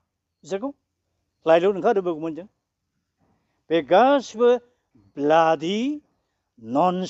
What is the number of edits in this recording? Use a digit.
0